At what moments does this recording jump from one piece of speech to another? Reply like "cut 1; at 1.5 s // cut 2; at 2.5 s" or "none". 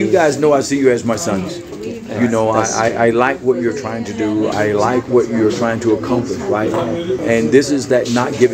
cut 1; at 4.5 s // cut 2; at 7.2 s